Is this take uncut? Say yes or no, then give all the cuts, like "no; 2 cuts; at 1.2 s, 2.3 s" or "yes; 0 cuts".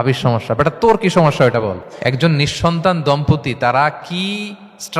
no; 1 cut; at 1.9 s